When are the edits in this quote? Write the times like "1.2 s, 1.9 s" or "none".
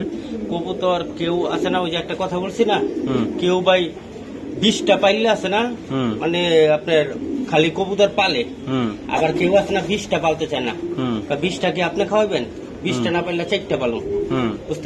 none